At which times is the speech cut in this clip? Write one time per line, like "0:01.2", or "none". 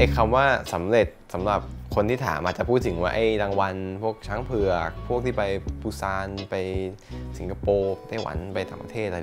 none